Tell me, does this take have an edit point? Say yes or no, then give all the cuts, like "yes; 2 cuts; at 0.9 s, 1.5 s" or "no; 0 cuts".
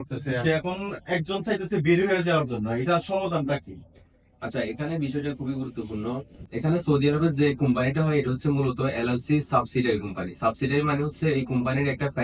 no; 0 cuts